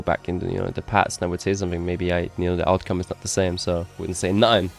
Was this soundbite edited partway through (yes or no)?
no